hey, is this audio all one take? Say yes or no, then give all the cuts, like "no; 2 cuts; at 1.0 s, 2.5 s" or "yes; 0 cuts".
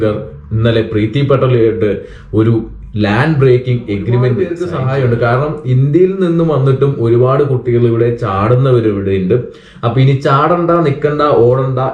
no; 1 cut; at 4.6 s